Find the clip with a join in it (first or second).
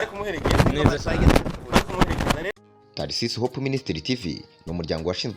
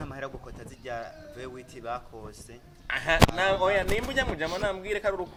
first